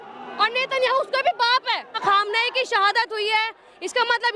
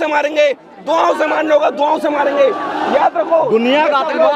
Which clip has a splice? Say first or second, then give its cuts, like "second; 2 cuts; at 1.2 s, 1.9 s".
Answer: first; 1 cut; at 2.0 s